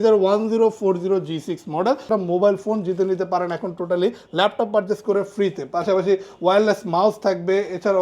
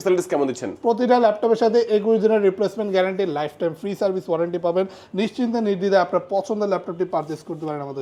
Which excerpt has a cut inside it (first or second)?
first